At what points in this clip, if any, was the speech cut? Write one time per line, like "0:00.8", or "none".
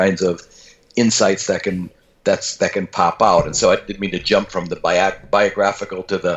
none